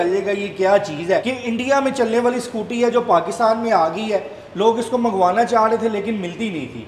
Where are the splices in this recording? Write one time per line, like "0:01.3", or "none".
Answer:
0:01.3